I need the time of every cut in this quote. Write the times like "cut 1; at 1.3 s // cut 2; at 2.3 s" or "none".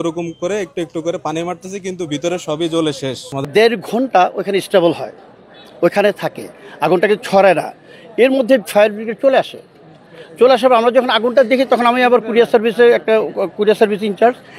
cut 1; at 3.5 s